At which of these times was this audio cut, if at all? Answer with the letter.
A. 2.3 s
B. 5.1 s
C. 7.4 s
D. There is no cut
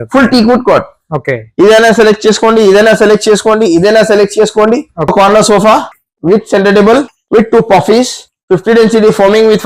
B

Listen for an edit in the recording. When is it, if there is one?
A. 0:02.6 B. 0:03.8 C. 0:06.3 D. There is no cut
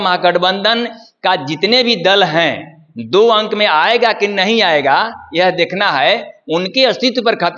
D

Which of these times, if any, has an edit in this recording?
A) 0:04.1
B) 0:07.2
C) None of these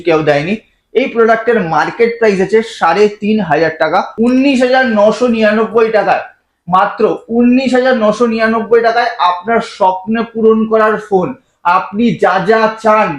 A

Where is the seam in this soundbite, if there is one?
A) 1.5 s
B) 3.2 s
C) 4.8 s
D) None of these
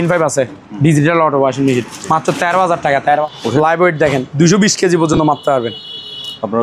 B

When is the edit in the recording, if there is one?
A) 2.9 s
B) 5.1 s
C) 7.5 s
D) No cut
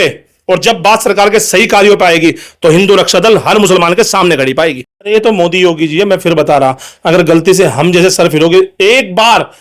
B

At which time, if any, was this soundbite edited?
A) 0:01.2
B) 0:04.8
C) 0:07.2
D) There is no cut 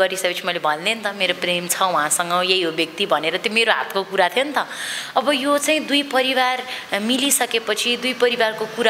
D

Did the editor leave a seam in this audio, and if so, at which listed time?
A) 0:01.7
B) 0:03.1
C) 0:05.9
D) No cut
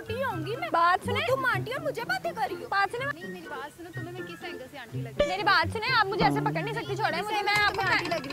B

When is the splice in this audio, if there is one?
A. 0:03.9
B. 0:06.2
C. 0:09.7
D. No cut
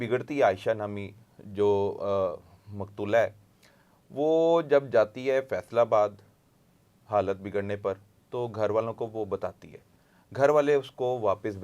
D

